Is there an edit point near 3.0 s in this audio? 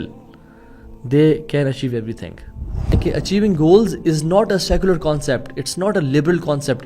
yes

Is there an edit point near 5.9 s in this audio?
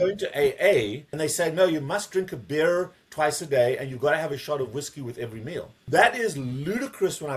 yes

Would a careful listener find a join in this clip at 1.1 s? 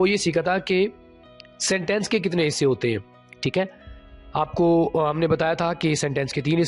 no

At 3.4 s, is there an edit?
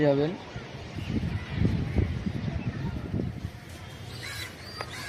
yes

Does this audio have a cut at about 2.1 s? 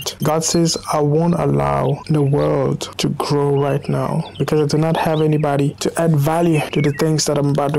no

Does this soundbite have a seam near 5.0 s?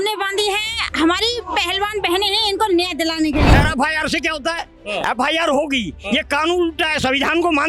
no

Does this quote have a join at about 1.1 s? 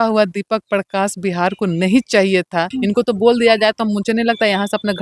no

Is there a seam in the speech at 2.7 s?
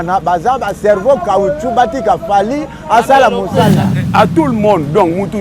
no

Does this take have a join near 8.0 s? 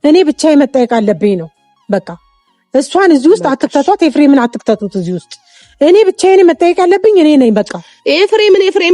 no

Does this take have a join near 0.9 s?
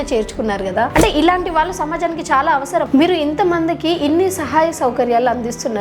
yes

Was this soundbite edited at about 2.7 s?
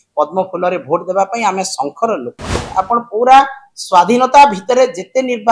yes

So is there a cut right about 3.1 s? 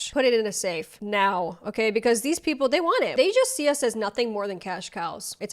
yes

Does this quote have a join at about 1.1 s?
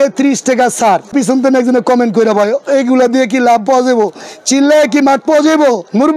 yes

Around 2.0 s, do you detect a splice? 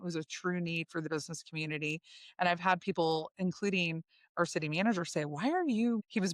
no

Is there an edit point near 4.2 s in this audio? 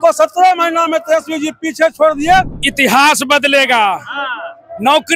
no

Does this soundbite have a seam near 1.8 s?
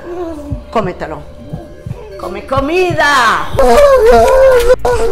no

